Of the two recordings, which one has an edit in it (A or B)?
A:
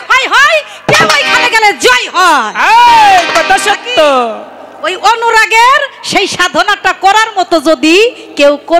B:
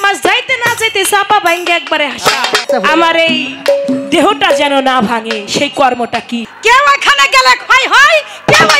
B